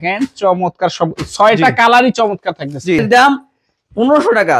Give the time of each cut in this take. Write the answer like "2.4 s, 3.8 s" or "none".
3.0 s